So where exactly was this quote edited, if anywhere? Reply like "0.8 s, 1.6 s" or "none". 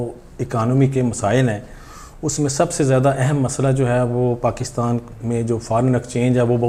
none